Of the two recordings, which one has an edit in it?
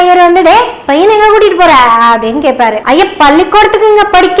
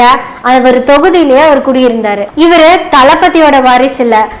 second; 1 cut; at 2.3 s

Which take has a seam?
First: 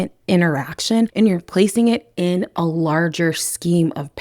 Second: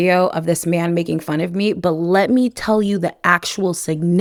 first; 1 cut; at 1.1 s

